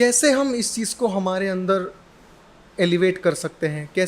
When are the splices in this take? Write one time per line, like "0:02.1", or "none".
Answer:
none